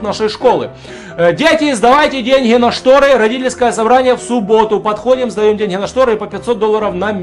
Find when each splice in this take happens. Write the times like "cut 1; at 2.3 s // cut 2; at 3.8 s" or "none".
none